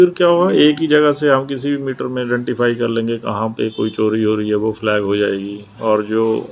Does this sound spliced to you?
no; 0 cuts

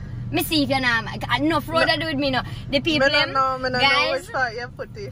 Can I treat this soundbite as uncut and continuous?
yes; 0 cuts

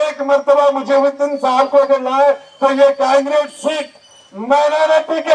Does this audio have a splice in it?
no; 0 cuts

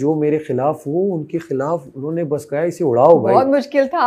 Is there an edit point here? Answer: no; 0 cuts

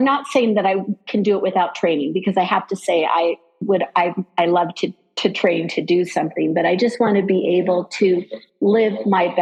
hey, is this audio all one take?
yes; 0 cuts

